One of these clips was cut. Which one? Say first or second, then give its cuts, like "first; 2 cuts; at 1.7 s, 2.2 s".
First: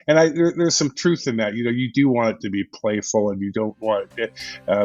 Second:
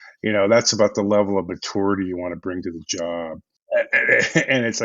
second; 1 cut; at 3.6 s